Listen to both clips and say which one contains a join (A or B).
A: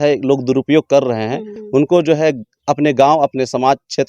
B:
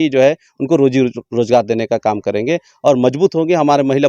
A